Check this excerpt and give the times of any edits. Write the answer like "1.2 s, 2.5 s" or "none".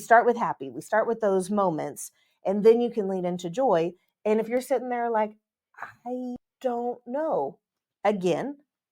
6.5 s

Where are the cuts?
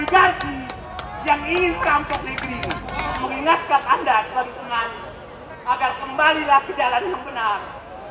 3.2 s

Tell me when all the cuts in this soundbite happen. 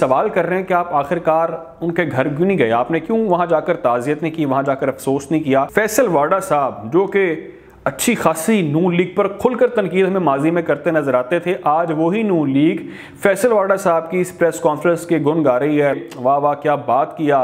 5.7 s, 15.9 s

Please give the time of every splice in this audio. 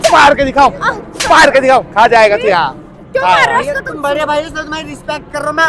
none

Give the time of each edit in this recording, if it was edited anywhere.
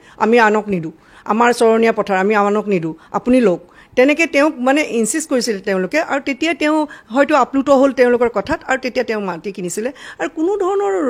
none

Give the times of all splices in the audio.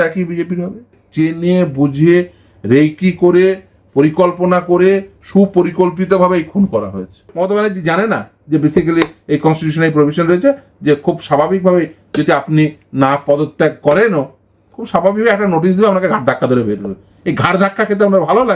1.0 s, 7.3 s

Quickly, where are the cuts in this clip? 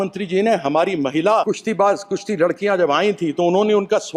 1.5 s

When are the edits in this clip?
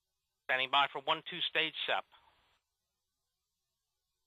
none

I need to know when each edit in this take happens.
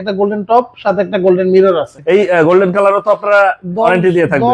1.9 s

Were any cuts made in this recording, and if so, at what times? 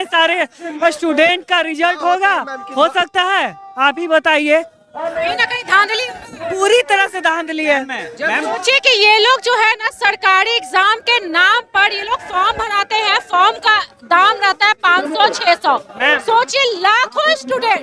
none

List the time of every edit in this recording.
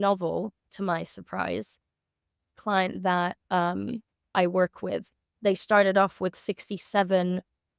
2.3 s

